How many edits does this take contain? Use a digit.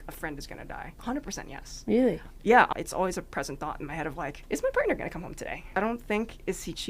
4